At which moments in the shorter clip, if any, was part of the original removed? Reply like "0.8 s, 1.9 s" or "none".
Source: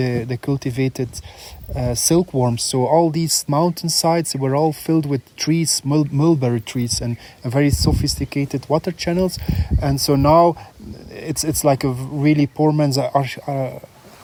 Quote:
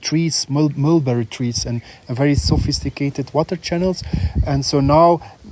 none

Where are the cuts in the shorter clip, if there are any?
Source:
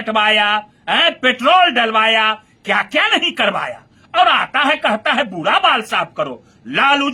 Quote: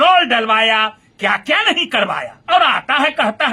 2.3 s

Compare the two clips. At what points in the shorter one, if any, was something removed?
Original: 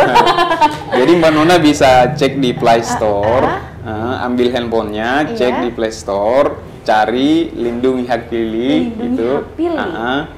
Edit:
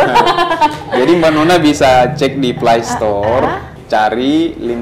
3.7 s

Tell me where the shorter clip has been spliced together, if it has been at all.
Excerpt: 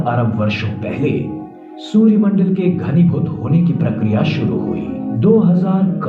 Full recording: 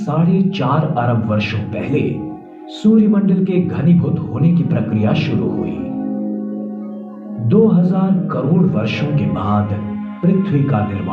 5.1 s

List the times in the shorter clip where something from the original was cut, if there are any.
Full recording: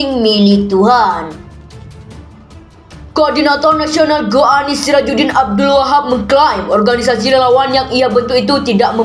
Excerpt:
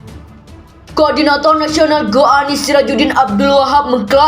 0.9 s

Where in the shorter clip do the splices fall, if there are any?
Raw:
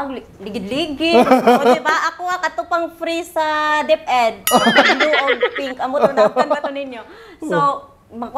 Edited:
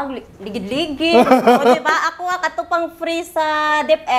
none

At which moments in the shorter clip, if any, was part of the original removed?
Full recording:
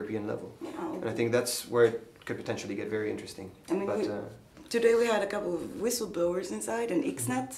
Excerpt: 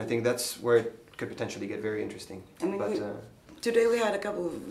none

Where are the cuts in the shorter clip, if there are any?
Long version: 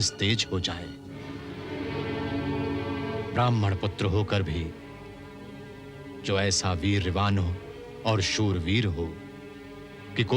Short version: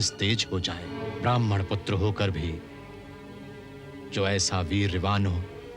0.9 s

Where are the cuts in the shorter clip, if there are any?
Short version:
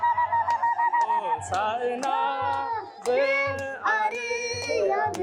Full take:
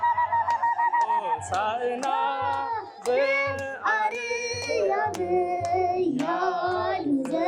none

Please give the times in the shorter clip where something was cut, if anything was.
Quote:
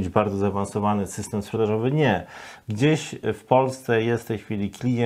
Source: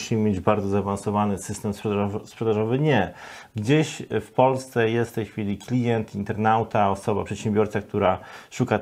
1.5 s

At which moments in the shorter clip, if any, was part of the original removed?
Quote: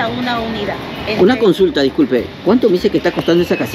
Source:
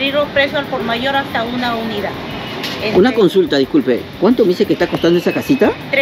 1.0 s

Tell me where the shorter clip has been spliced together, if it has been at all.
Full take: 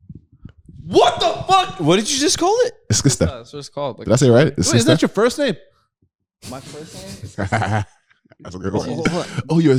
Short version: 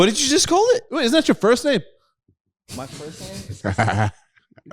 1.0 s

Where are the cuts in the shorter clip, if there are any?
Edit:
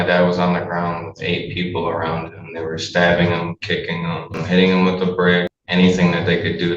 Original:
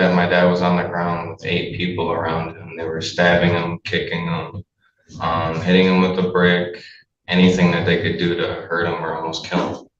4.4 s, 5.6 s

